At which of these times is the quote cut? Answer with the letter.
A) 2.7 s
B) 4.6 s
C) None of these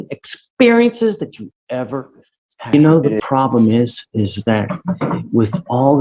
A